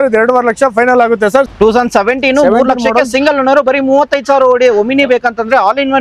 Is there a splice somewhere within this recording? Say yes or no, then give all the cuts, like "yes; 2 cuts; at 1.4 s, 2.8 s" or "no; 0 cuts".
yes; 1 cut; at 1.5 s